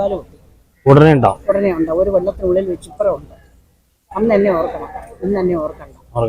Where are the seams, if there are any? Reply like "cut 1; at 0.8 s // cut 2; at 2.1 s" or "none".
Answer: none